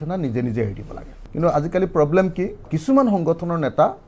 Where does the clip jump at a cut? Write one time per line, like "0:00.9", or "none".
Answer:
0:01.2
0:02.7